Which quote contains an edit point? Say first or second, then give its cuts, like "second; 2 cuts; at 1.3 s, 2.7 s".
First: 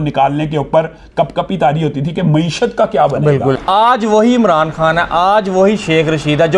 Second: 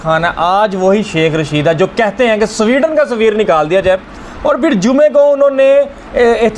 first; 1 cut; at 3.6 s